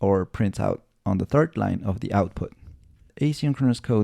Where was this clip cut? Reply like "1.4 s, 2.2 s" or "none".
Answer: 3.0 s